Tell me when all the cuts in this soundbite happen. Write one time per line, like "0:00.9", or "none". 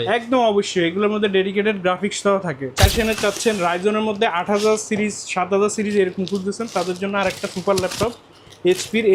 0:02.9